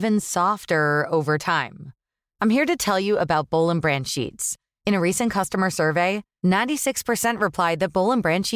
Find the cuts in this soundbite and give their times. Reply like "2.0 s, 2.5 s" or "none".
none